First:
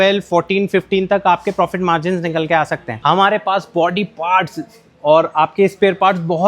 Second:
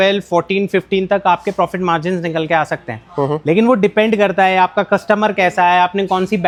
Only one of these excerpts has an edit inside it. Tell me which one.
first; 1 cut; at 3.0 s

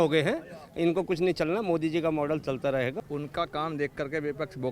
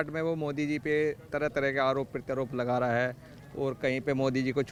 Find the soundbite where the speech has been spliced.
first; 1 cut; at 3.0 s

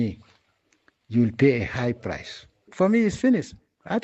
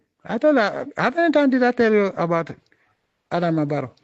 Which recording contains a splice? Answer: first; 1 cut; at 2.7 s

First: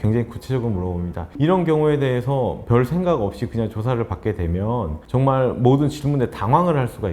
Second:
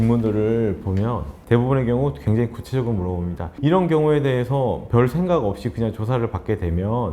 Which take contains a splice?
second; 1 cut; at 1.3 s

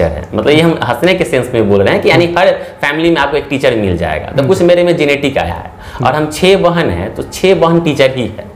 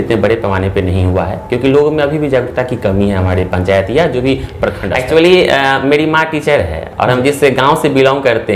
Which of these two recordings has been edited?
second; 1 cut; at 4.9 s

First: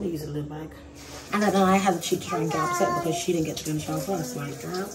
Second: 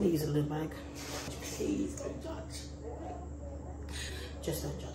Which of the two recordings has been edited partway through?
first; 1 cut; at 1.1 s

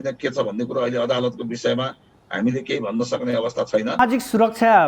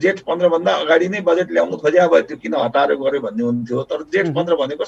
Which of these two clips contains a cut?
first; 1 cut; at 4.0 s

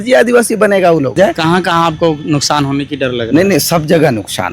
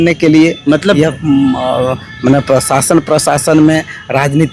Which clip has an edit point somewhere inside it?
first; 1 cut; at 1.1 s

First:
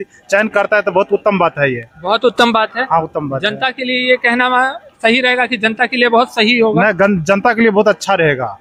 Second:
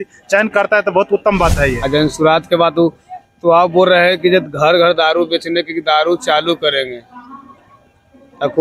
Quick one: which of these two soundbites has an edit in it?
second; 1 cut; at 1.8 s

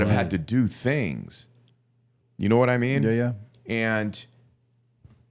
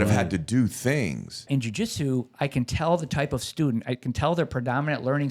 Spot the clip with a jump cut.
second; 1 cut; at 1.5 s

